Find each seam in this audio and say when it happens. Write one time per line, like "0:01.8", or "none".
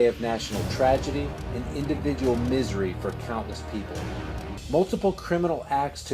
0:01.2